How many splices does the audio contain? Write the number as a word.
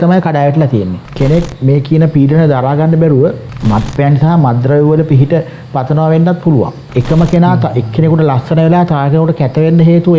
three